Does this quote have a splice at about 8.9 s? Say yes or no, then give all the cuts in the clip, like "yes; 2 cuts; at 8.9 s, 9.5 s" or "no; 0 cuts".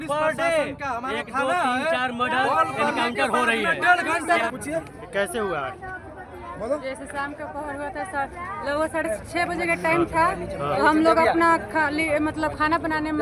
no; 1 cut; at 4.2 s